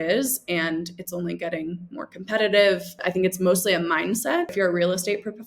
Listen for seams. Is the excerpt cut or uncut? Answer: cut